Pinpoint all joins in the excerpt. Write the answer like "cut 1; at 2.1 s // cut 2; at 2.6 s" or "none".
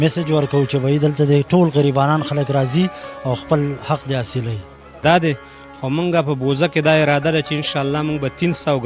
cut 1; at 5.0 s